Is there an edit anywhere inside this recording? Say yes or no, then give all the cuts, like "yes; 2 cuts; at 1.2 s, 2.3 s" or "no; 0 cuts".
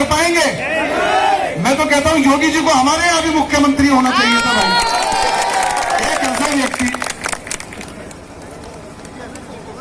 no; 0 cuts